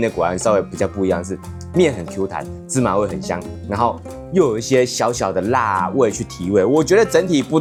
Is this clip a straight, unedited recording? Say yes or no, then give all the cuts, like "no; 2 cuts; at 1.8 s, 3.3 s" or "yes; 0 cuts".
yes; 0 cuts